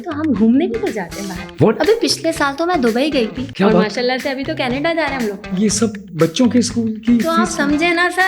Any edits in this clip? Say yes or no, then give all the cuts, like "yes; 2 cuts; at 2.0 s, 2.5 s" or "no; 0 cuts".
no; 0 cuts